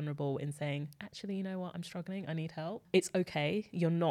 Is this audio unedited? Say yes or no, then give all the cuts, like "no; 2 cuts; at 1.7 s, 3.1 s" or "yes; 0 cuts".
yes; 0 cuts